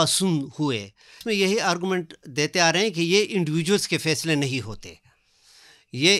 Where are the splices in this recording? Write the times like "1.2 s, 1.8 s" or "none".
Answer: 1.2 s